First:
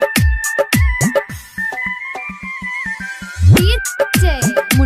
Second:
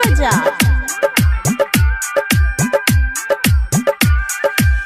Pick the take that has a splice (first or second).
first